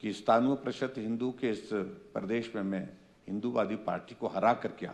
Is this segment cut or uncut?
uncut